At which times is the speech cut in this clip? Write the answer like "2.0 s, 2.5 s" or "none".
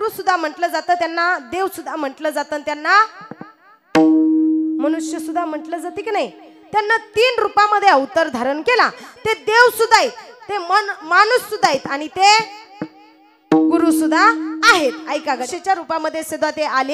15.5 s